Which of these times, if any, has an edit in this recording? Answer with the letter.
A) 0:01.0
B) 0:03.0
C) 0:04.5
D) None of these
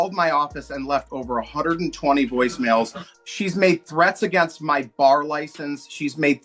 B